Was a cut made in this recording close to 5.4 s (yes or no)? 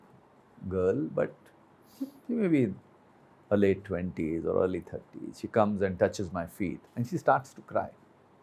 no